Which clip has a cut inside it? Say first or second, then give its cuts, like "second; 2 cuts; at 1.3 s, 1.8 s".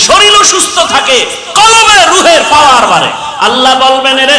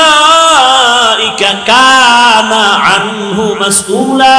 first; 1 cut; at 3.2 s